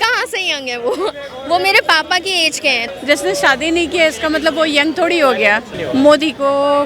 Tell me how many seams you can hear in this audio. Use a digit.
2